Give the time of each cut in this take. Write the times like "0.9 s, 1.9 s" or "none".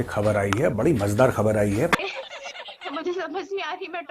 1.9 s